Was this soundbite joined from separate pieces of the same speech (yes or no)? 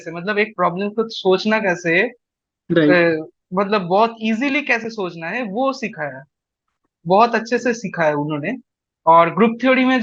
no